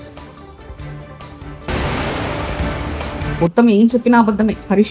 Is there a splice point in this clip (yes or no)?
yes